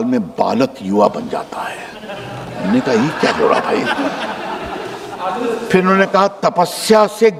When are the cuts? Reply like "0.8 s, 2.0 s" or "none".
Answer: none

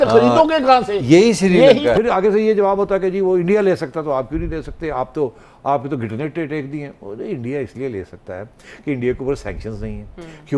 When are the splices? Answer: 1.9 s

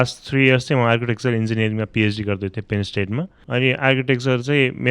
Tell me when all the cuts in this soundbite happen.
3.3 s

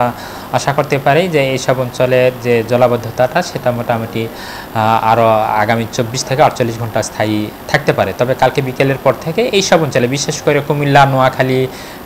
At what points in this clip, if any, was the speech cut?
none

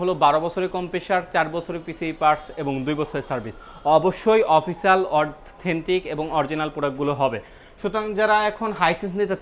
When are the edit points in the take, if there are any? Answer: none

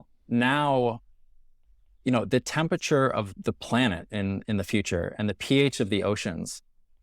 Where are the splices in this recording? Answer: 3.3 s

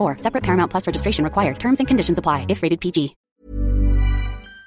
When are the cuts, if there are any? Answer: 3.2 s

